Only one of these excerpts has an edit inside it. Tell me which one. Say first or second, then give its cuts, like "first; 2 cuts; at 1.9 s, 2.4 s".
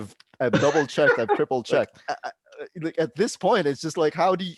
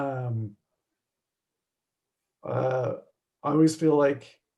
first; 1 cut; at 2.1 s